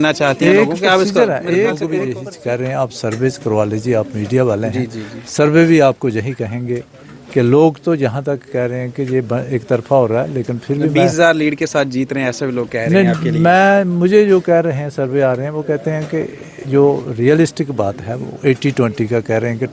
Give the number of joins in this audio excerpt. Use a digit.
1